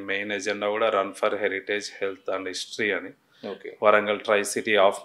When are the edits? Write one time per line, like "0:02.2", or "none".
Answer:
none